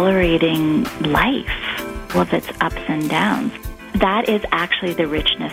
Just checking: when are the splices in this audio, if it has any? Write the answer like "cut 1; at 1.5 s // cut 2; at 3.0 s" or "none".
cut 1; at 0.9 s // cut 2; at 2.1 s // cut 3; at 3.5 s